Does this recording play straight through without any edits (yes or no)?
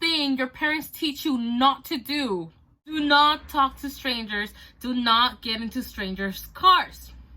no